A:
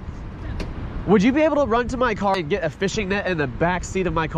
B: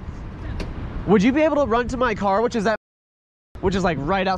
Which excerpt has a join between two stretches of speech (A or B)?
A